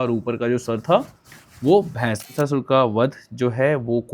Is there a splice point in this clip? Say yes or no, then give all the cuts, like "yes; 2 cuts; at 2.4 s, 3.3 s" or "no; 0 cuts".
yes; 1 cut; at 2.3 s